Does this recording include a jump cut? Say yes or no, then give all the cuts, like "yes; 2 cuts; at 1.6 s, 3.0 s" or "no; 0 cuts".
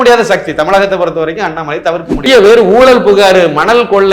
yes; 1 cut; at 2.2 s